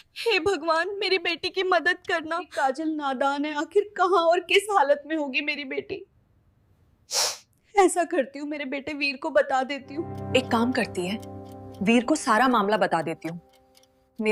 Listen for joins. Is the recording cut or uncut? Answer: uncut